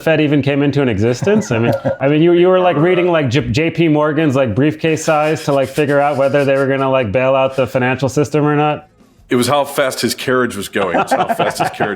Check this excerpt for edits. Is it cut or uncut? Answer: cut